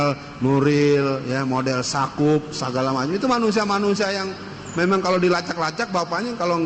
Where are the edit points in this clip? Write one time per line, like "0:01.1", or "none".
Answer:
none